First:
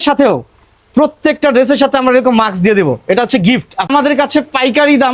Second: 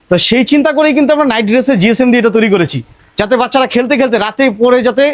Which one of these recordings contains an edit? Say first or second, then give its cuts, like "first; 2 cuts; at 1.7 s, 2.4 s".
first; 1 cut; at 3.9 s